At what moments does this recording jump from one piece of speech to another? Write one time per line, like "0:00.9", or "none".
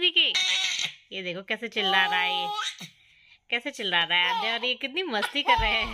none